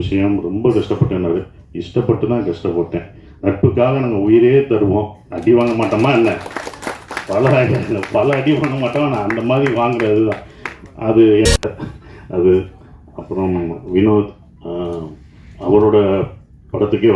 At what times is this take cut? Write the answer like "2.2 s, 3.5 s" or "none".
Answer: 11.5 s